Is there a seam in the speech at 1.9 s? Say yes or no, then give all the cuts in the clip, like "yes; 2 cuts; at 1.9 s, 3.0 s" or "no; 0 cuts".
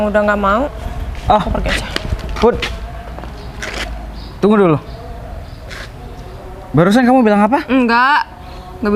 no; 0 cuts